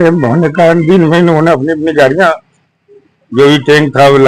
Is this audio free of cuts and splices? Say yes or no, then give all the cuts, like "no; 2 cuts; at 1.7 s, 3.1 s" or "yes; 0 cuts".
yes; 0 cuts